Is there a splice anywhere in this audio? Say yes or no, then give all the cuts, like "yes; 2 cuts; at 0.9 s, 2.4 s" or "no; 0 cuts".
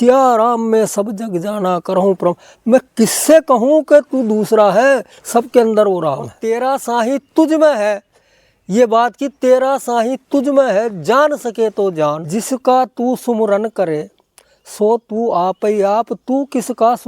yes; 2 cuts; at 6.4 s, 12.2 s